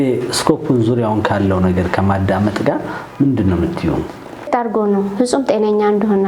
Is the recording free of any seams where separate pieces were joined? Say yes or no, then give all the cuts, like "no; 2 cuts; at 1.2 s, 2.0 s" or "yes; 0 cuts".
no; 1 cut; at 4.5 s